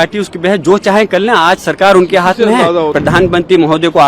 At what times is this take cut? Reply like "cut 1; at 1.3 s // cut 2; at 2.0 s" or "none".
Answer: cut 1; at 2.9 s